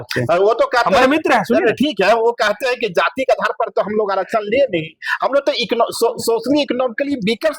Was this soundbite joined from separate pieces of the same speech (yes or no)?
no